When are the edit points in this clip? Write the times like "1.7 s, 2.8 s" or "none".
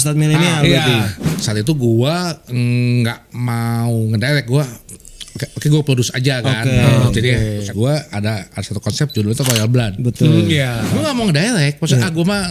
1.4 s, 7.6 s, 10.8 s